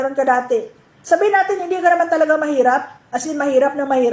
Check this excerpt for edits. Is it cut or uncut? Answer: uncut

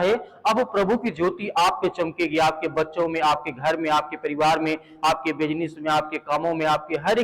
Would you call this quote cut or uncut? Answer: uncut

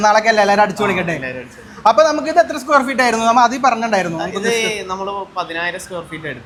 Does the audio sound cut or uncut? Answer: uncut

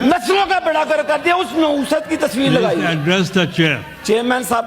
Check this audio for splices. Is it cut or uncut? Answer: uncut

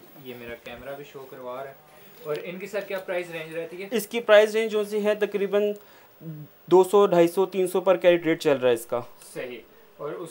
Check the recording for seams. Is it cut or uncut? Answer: uncut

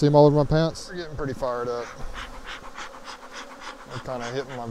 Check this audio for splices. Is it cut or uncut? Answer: cut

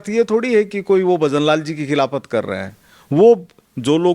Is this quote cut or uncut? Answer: uncut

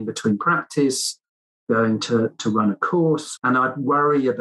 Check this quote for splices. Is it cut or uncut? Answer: cut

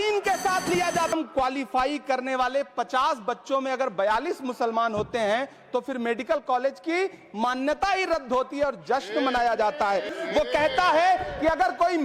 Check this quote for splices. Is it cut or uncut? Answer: cut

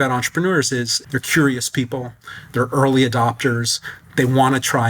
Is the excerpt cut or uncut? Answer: cut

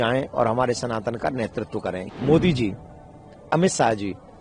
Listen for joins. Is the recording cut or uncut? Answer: cut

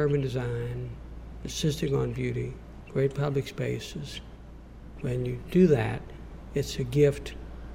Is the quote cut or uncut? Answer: cut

